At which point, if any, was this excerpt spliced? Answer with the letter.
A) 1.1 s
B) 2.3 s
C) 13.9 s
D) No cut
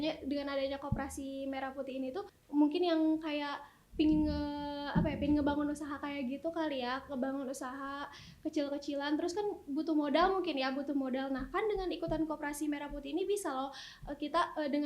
B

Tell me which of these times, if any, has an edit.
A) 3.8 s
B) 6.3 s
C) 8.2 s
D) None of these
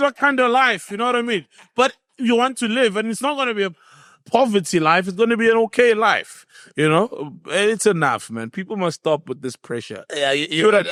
D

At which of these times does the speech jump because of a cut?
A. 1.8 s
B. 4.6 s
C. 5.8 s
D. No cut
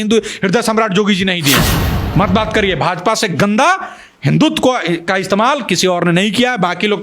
A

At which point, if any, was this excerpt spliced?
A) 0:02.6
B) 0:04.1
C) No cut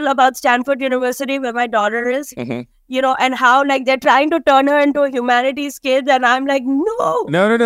C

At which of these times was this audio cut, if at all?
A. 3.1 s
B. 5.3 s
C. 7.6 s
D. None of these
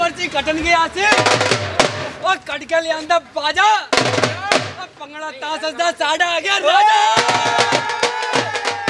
D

